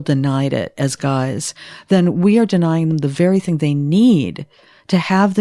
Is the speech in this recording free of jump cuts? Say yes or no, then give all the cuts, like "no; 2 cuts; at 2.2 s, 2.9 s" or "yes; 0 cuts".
yes; 0 cuts